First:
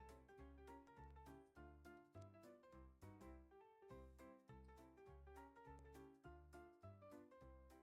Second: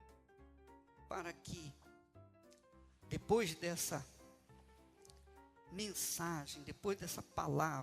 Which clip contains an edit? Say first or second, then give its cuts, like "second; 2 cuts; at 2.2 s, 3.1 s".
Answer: second; 3 cuts; at 1.1 s, 4.0 s, 5.7 s